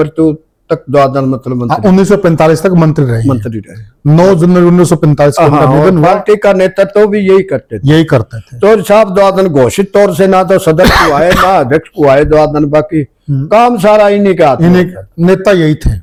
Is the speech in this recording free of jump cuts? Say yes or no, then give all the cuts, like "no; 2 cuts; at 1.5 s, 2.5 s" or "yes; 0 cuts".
yes; 0 cuts